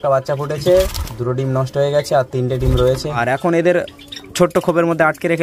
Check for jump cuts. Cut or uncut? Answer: cut